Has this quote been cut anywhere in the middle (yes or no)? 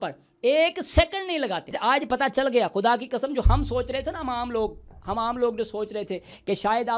yes